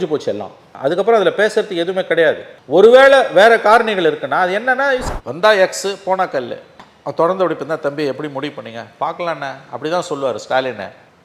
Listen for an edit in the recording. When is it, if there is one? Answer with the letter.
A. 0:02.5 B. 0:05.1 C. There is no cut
B